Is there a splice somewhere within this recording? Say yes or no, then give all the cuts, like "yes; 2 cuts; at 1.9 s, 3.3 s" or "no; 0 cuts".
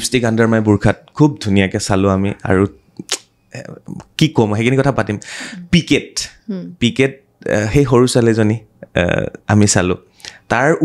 no; 0 cuts